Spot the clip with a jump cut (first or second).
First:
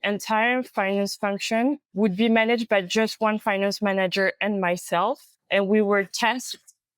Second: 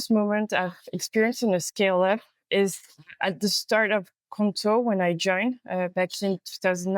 first